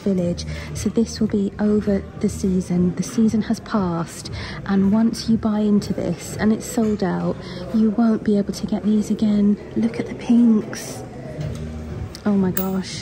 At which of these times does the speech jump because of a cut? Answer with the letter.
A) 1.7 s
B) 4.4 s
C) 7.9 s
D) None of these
D